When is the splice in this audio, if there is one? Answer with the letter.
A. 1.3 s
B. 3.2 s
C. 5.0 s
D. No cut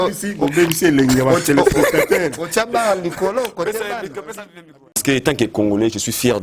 C